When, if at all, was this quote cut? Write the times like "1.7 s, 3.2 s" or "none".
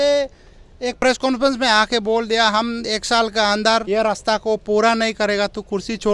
1.0 s, 3.8 s